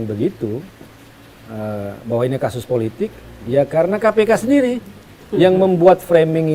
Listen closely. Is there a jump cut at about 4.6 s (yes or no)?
no